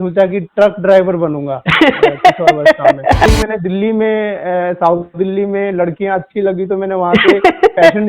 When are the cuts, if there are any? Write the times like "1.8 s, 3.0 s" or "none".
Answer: 3.3 s